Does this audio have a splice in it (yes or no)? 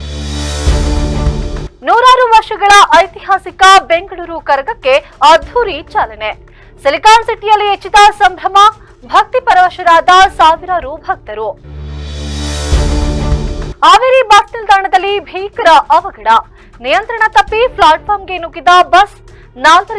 yes